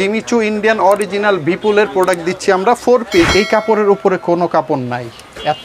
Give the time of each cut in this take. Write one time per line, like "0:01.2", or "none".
0:03.3